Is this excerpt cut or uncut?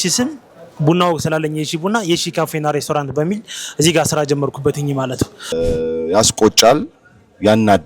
cut